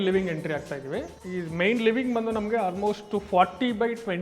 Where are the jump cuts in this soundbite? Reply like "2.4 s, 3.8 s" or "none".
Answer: 1.2 s